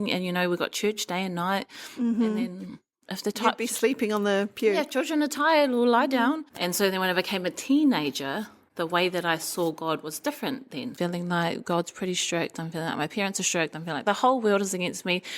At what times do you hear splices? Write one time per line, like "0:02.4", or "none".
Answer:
0:06.5
0:08.6
0:10.9
0:14.0